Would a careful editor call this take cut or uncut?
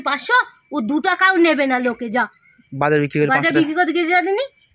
uncut